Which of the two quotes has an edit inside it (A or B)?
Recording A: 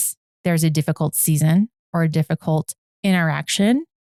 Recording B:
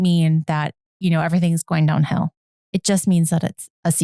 B